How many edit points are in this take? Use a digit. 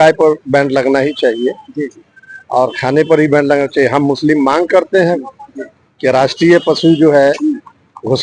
0